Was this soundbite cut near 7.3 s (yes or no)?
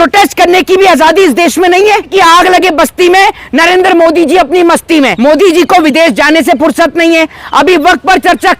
no